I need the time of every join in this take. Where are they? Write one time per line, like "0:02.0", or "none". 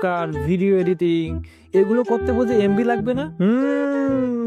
0:03.3